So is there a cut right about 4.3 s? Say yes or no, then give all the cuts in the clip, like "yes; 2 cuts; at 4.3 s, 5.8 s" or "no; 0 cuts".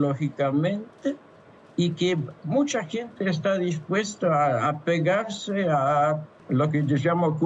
no; 1 cut; at 6.3 s